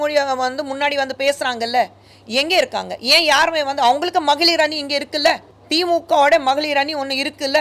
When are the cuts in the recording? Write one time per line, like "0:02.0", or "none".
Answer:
0:05.5